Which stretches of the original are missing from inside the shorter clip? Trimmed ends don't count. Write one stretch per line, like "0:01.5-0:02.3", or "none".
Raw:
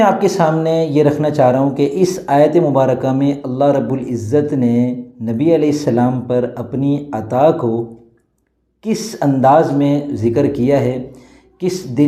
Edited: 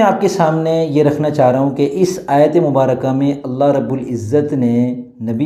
none